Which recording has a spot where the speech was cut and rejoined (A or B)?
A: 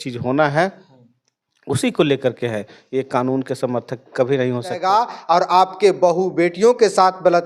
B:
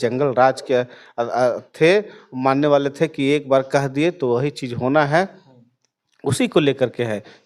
A